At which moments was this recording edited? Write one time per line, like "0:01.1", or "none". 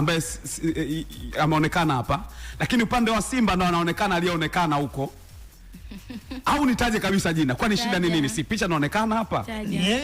none